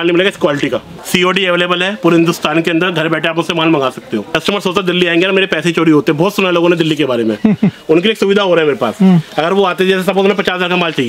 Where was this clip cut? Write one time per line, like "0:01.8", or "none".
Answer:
0:00.9
0:04.3